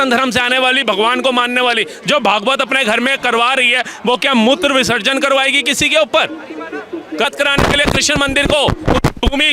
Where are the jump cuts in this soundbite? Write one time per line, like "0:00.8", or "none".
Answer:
0:07.2